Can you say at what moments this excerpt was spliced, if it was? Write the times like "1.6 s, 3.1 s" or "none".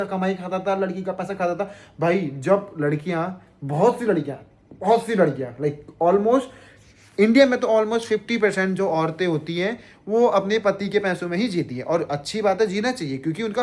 none